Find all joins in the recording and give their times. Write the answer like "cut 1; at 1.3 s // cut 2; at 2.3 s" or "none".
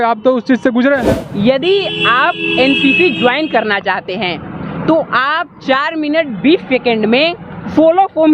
cut 1; at 1.2 s